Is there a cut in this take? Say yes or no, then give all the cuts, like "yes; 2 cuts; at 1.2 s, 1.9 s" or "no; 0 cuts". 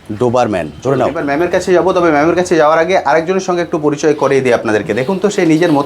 yes; 1 cut; at 1.2 s